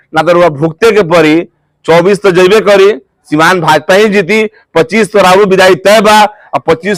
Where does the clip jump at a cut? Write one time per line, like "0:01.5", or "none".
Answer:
none